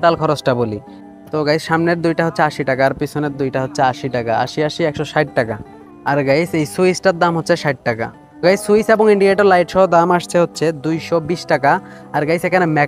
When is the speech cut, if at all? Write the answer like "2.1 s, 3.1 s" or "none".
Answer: none